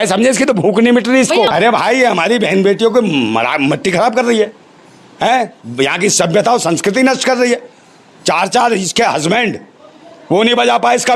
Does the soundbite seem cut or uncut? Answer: cut